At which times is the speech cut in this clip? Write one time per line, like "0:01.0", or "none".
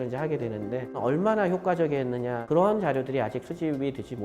0:01.0
0:02.4